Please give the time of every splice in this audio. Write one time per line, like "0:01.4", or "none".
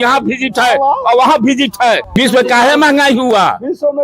0:02.1